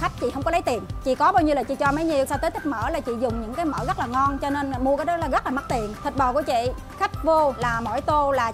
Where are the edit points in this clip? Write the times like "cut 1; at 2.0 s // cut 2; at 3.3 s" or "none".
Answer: cut 1; at 0.9 s // cut 2; at 2.3 s // cut 3; at 5.9 s // cut 4; at 7.6 s